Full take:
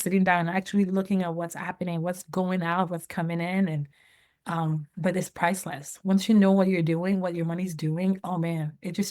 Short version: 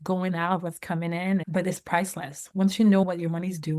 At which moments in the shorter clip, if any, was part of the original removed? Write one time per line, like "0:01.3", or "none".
0:01.4
0:03.0